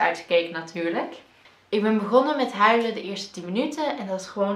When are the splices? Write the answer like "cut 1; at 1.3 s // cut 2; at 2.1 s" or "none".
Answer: cut 1; at 1.2 s